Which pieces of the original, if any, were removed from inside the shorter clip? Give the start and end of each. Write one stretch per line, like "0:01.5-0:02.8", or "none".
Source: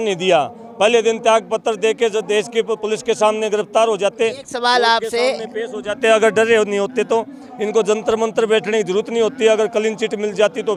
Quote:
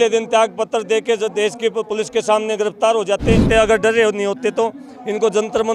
0:04.4-0:06.0